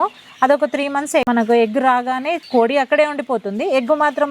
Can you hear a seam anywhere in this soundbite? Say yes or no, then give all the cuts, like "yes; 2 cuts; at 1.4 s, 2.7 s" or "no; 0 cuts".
yes; 2 cuts; at 1.3 s, 2.4 s